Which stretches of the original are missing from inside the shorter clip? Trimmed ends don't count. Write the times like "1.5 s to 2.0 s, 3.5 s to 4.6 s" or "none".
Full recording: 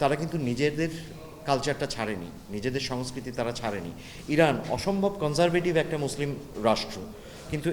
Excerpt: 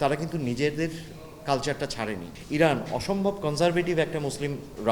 2.3 s to 4.1 s